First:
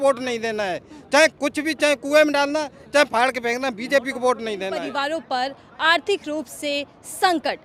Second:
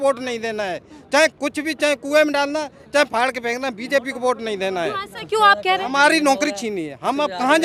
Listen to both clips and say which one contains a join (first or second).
first